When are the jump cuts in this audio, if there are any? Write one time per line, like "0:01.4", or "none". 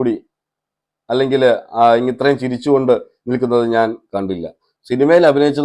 0:04.7